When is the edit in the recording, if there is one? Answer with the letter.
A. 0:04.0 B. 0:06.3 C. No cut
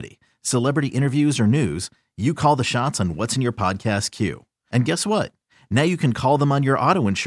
C